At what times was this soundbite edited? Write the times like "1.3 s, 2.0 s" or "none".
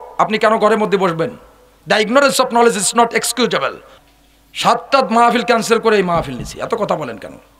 3.9 s

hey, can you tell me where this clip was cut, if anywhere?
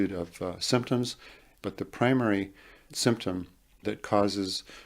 1.6 s, 3.9 s

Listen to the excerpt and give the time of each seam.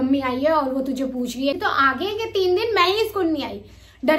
1.6 s

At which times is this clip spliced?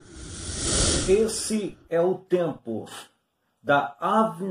1.0 s

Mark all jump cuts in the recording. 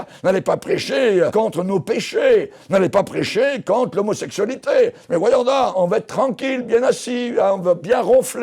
1.3 s, 5.7 s

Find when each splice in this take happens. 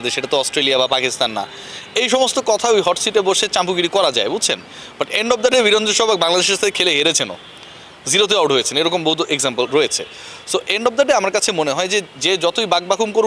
none

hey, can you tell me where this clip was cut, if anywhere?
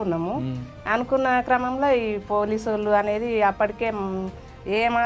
none

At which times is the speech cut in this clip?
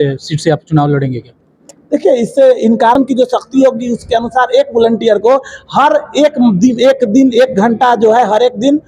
3.0 s

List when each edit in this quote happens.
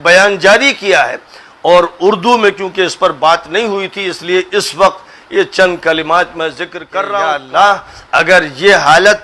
7.2 s

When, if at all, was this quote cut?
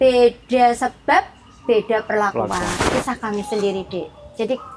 2.7 s

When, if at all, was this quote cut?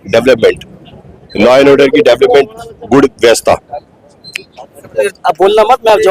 5.1 s

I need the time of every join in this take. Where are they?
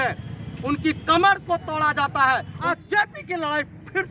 2.7 s

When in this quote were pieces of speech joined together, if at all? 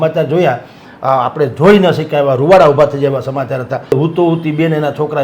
3.9 s

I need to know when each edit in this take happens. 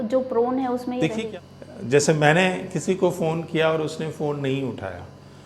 1.2 s

